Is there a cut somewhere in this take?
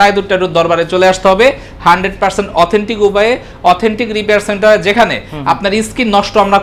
no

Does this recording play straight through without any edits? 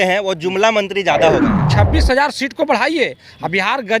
no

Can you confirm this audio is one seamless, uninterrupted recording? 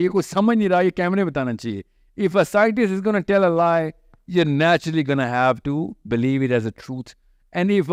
yes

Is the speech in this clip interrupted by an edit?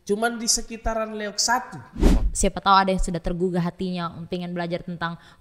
yes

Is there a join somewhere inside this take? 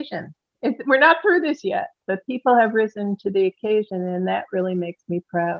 no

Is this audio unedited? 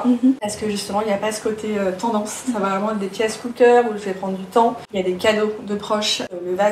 yes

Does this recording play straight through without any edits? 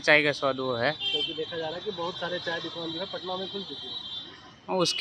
yes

